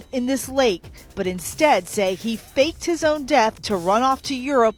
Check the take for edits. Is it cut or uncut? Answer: uncut